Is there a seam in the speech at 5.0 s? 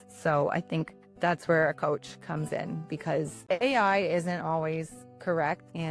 no; 1 cut; at 3.4 s

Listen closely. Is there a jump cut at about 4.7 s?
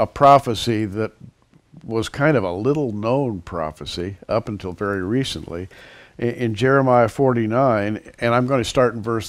yes; 1 cut; at 4.7 s

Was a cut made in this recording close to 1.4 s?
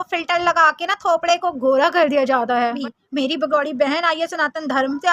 no; 1 cut; at 2.8 s

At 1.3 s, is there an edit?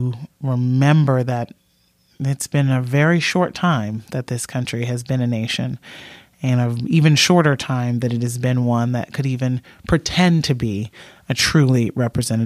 no; 0 cuts

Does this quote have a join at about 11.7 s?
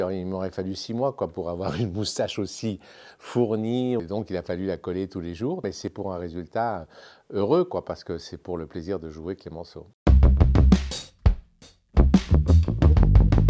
no; 2 cuts; at 4.0 s, 5.8 s

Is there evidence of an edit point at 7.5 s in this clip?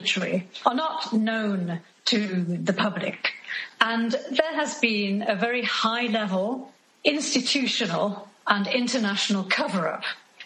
no; 1 cut; at 3.6 s

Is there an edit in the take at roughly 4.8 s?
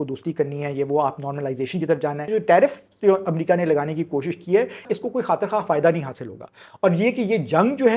yes; 2 cuts; at 2.2 s, 4.8 s

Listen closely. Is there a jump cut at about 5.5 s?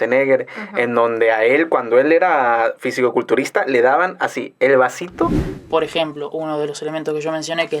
yes; 1 cut; at 5.5 s

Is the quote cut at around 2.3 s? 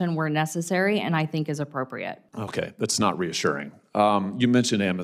yes; 2 cuts; at 2.3 s, 3.8 s

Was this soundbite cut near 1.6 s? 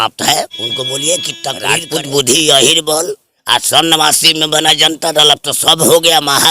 yes; 1 cut; at 1.6 s

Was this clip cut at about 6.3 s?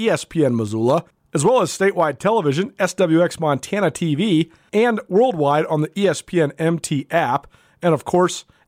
no; 2 cuts; at 1.2 s, 4.6 s

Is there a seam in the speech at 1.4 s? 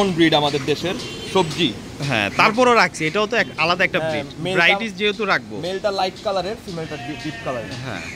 no; 0 cuts

